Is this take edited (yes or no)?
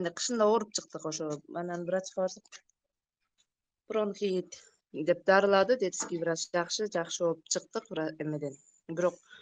no